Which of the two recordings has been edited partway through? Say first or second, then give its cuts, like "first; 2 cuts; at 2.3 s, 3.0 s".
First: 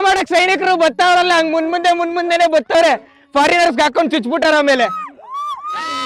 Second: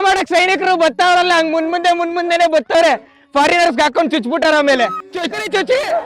second; 1 cut; at 5.0 s